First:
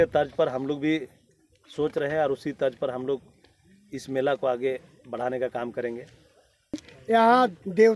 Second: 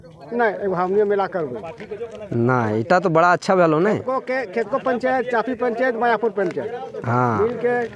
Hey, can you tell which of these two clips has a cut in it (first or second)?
first